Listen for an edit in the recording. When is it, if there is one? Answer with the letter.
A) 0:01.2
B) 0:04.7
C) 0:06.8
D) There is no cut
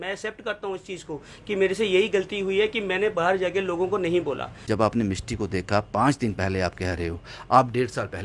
B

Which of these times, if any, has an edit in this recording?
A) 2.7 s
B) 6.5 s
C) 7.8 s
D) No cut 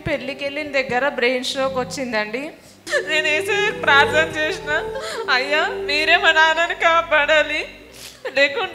A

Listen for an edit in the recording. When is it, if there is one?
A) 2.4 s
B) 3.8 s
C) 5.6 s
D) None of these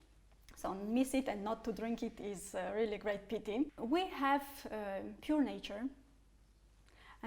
B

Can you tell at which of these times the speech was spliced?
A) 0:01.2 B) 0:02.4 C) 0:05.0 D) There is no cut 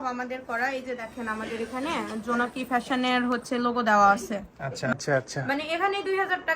C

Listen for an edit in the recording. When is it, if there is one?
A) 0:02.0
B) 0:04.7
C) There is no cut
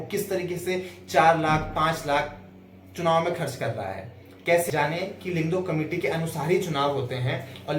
B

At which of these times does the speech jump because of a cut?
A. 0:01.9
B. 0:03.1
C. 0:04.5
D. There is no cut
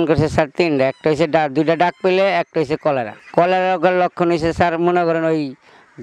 B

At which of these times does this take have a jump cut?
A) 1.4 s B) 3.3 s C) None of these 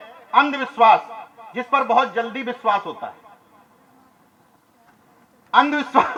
C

